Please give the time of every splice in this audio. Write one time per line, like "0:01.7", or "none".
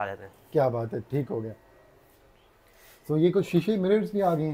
none